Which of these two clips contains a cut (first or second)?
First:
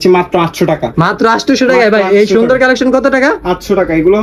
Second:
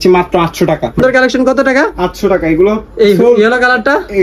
second